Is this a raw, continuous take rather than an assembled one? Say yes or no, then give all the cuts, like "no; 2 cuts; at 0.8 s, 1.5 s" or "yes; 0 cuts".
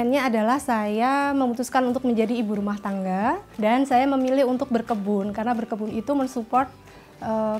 no; 1 cut; at 3.5 s